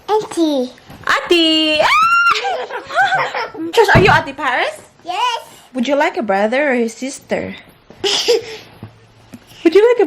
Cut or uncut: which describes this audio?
cut